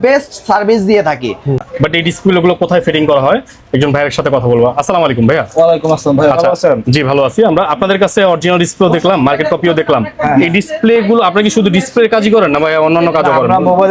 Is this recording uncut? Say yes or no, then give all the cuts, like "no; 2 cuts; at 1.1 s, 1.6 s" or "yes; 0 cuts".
no; 1 cut; at 1.6 s